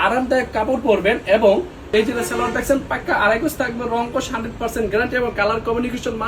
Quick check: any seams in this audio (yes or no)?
yes